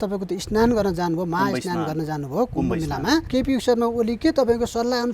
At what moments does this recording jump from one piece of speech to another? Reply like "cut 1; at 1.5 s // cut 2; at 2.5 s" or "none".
cut 1; at 3.3 s